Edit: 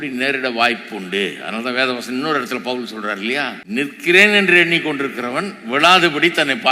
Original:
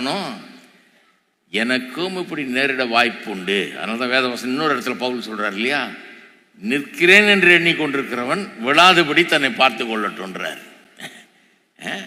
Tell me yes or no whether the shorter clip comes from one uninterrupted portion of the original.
no